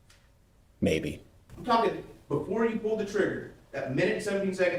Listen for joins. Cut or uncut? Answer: cut